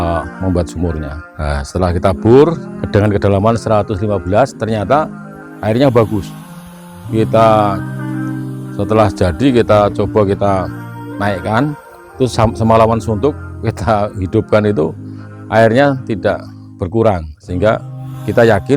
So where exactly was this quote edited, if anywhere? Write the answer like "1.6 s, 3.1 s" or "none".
1.2 s, 2.7 s